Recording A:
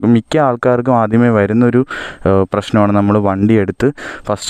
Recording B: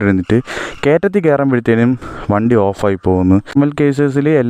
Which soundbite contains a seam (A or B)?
B